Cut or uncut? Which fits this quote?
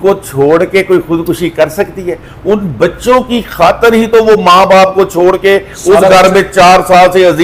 uncut